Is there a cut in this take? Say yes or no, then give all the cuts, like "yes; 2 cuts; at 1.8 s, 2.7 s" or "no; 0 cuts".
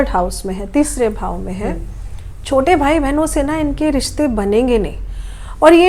no; 0 cuts